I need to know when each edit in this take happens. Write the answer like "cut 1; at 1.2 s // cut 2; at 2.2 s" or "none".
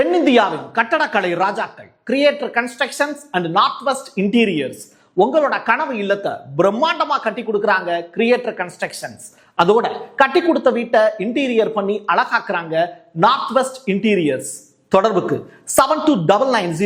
none

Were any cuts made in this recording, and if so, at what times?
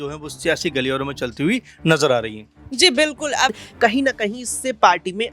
cut 1; at 3.5 s

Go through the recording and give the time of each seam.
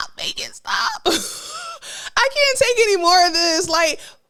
none

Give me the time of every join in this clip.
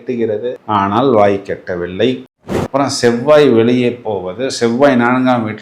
cut 1; at 2.3 s

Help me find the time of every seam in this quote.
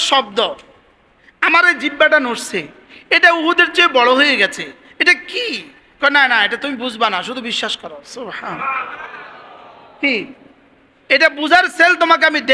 none

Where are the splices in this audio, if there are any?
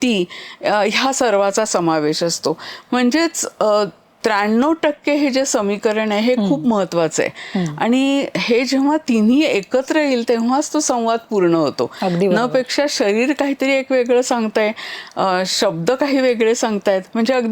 none

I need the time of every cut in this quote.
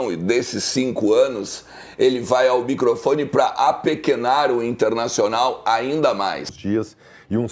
cut 1; at 6.5 s

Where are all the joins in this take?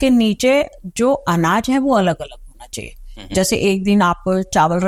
none

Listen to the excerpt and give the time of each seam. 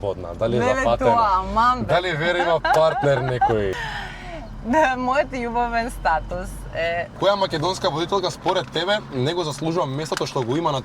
cut 1; at 3.8 s // cut 2; at 7.1 s

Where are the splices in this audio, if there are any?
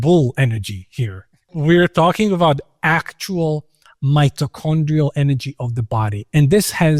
none

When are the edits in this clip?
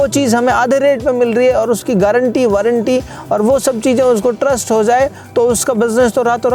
none

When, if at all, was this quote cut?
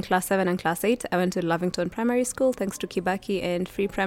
none

